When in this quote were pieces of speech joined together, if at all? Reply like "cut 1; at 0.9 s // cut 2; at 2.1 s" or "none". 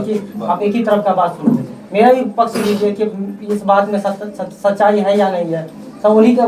none